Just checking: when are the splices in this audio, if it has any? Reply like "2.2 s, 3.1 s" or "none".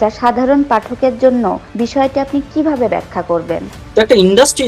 1.6 s, 3.7 s